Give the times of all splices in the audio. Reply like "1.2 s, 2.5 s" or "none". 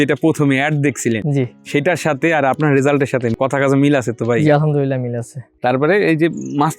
none